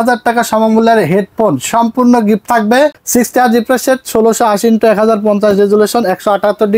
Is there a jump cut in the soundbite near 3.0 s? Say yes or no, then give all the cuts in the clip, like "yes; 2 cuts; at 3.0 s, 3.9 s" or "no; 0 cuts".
yes; 1 cut; at 3.0 s